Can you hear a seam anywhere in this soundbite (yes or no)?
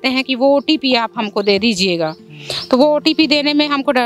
no